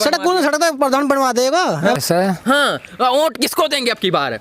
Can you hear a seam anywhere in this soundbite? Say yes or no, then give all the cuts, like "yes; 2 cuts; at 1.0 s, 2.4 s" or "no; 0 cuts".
yes; 1 cut; at 2.0 s